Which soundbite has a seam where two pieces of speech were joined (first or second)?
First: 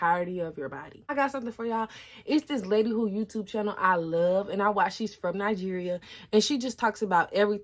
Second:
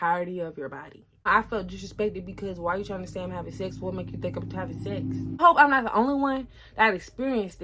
second